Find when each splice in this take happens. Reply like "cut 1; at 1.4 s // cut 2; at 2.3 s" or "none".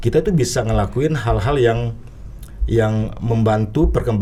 none